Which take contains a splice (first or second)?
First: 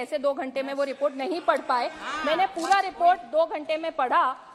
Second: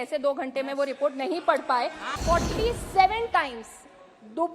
second